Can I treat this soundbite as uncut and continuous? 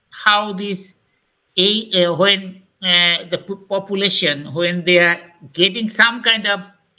yes; 0 cuts

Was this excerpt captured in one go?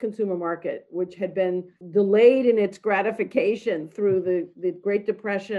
no; 1 cut; at 1.8 s

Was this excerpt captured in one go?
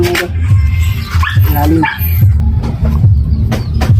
no; 1 cut; at 2.3 s

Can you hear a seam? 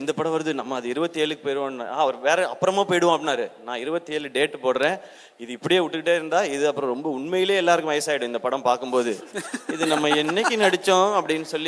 no; 0 cuts

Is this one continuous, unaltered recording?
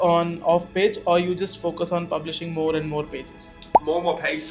yes; 0 cuts

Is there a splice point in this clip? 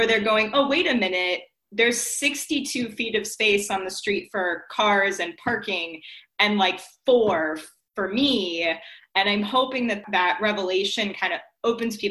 yes; 1 cut; at 10.0 s

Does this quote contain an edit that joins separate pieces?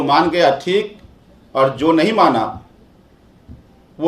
no; 0 cuts

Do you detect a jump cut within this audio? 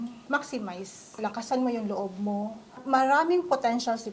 yes; 2 cuts; at 1.2 s, 2.8 s

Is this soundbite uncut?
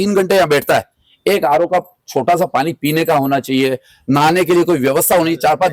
yes; 0 cuts

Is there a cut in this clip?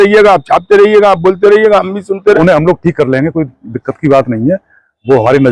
yes; 1 cut; at 2.4 s

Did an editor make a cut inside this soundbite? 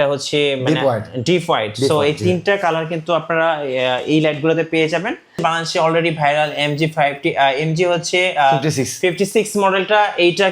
yes; 1 cut; at 5.4 s

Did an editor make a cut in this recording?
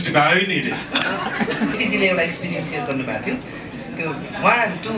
yes; 1 cut; at 1.8 s

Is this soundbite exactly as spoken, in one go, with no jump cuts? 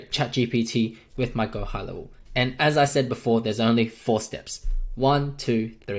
no; 1 cut; at 2.2 s

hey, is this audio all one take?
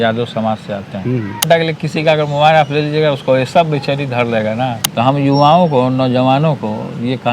no; 2 cuts; at 1.5 s, 4.9 s

